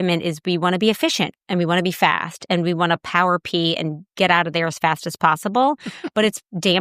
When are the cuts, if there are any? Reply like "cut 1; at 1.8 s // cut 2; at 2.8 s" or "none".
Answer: none